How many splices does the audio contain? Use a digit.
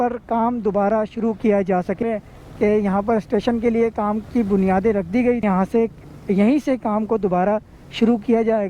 2